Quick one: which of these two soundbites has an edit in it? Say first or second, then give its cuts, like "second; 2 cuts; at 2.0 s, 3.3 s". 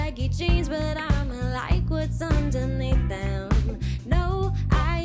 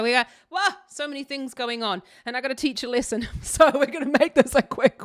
first; 1 cut; at 3.9 s